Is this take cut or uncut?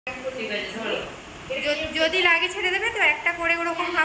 uncut